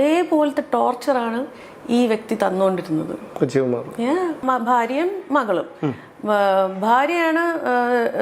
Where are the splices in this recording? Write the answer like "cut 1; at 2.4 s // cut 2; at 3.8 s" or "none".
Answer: cut 1; at 4.4 s